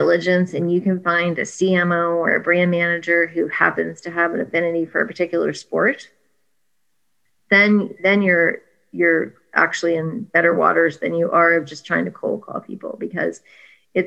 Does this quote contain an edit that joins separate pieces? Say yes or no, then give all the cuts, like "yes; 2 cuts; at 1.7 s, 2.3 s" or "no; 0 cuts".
no; 0 cuts